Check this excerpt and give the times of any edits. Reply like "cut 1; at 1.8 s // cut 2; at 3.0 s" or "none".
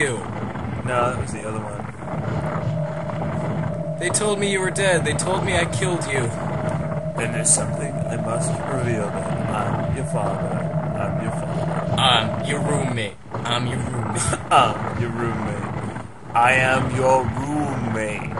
cut 1; at 16.9 s